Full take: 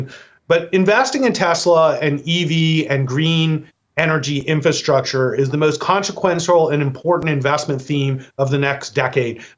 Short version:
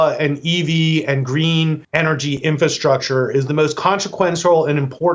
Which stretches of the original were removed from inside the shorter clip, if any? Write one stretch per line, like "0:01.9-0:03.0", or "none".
0:03.7-0:03.9